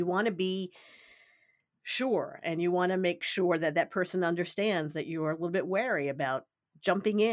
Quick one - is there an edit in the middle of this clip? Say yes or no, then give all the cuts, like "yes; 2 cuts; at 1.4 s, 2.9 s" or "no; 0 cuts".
yes; 1 cut; at 3.3 s